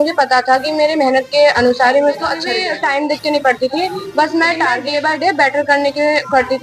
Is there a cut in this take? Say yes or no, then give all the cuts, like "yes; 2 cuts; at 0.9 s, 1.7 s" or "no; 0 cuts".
yes; 2 cuts; at 2.5 s, 4.8 s